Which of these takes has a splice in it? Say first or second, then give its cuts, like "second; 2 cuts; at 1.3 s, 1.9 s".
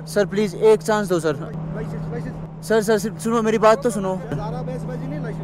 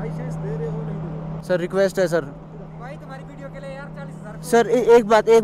first; 2 cuts; at 1.5 s, 4.5 s